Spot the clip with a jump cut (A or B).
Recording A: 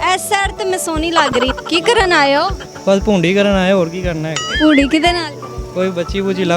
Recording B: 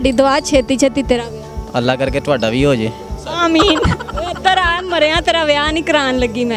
A